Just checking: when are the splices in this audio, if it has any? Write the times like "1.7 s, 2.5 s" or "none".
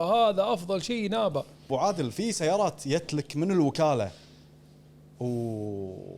1.7 s